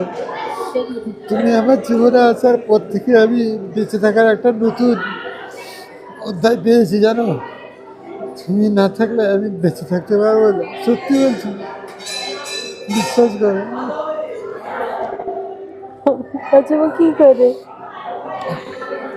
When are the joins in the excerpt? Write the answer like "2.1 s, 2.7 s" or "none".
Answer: none